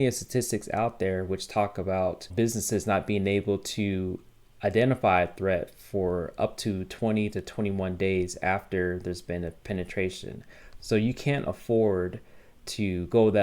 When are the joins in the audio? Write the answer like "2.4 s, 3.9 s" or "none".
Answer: 2.2 s